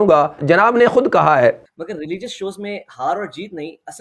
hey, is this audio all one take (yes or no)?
no